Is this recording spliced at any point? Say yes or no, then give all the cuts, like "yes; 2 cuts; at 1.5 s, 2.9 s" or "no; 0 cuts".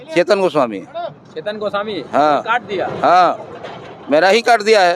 no; 0 cuts